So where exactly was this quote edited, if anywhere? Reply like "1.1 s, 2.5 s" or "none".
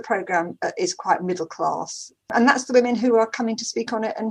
none